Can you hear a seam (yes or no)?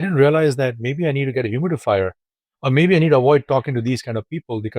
no